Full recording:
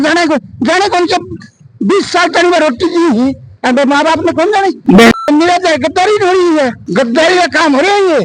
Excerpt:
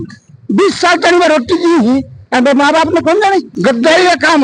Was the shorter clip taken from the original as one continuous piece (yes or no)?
no